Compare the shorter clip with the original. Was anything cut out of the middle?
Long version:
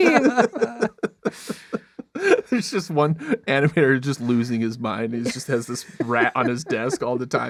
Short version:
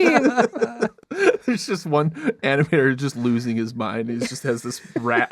yes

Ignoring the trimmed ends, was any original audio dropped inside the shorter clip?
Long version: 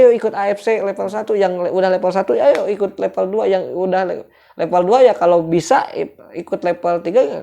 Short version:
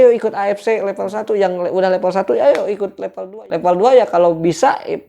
yes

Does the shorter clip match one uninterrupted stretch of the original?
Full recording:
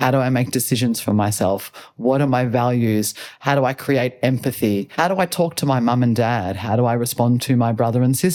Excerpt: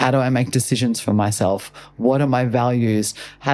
yes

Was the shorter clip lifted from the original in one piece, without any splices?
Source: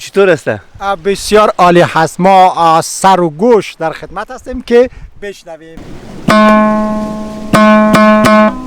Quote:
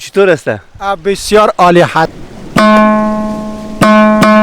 no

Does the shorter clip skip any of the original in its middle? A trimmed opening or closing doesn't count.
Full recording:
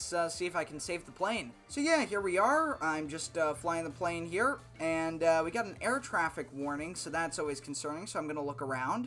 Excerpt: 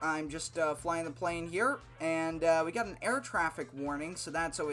no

